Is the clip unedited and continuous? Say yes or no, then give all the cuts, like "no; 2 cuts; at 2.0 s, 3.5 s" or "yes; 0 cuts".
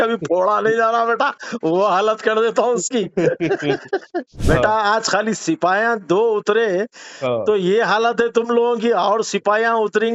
no; 1 cut; at 4.3 s